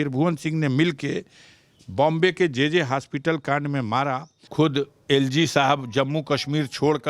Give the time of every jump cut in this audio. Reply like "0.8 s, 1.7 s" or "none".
4.4 s

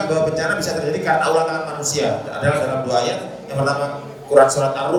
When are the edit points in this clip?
none

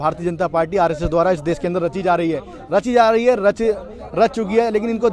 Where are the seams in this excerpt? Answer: none

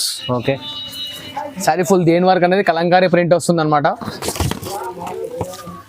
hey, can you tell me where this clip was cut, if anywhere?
4.0 s

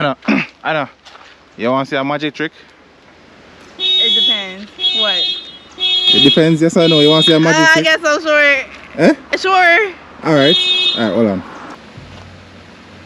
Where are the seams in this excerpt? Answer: none

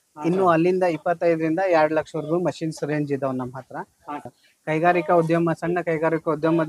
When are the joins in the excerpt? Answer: 4.3 s

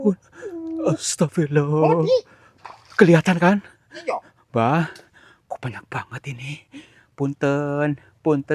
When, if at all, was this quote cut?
none

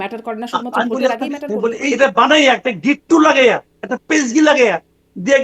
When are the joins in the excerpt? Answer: 1.9 s

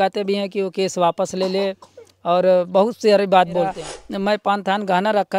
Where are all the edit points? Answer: 3.8 s

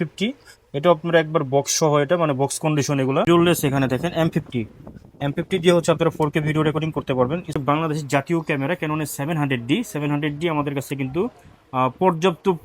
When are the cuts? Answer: 3.2 s, 7.6 s

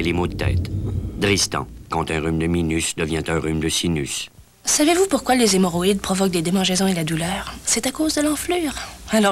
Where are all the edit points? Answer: none

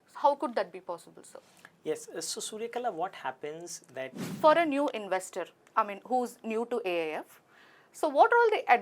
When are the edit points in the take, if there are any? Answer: 4.2 s

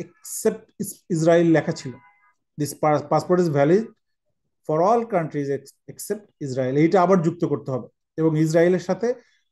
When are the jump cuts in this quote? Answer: none

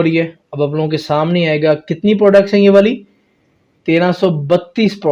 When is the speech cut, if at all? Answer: none

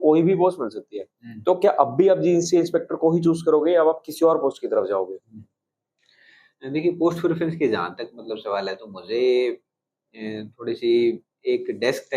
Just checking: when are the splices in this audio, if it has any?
none

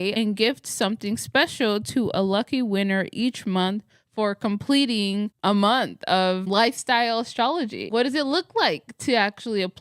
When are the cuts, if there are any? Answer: 7.9 s

